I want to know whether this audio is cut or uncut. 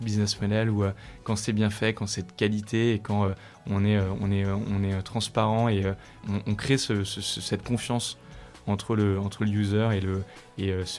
cut